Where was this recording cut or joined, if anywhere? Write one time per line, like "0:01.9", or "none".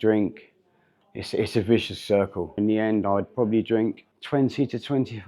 0:02.6
0:04.1